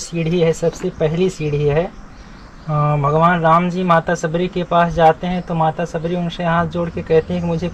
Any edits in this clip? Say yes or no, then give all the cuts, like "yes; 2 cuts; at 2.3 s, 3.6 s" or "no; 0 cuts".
no; 0 cuts